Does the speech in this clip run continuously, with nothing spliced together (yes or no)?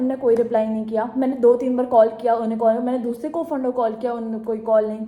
yes